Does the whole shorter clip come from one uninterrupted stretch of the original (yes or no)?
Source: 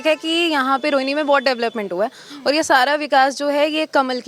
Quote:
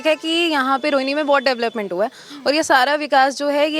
yes